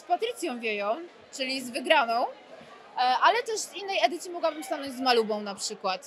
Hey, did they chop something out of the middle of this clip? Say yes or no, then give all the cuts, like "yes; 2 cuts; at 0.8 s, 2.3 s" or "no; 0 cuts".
no; 0 cuts